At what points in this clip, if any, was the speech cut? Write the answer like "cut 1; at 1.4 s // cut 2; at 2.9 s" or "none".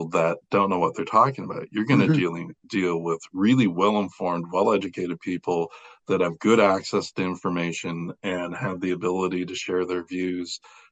none